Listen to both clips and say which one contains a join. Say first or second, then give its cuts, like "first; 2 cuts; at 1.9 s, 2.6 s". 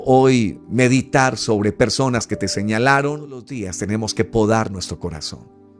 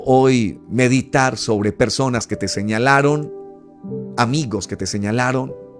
first; 1 cut; at 3.7 s